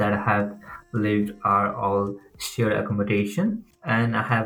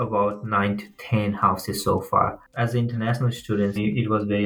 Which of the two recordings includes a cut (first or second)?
second